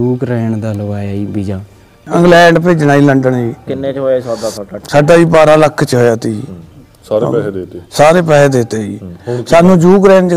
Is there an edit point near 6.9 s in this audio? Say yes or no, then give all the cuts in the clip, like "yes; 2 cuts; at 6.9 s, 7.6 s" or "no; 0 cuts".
no; 1 cut; at 2.0 s